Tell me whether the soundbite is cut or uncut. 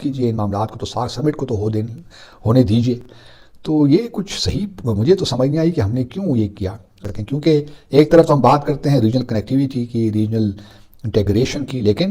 uncut